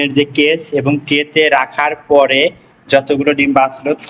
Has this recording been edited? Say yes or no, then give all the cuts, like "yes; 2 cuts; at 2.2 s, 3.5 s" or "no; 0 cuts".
no; 0 cuts